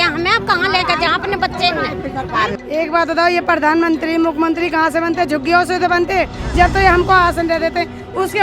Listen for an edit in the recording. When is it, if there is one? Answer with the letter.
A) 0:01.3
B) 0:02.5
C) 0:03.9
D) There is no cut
B